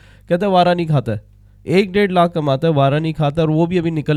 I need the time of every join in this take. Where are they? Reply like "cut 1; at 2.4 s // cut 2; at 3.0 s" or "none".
none